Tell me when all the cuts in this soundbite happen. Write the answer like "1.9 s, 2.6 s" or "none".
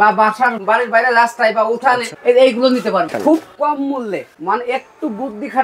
2.1 s, 3.1 s, 4.3 s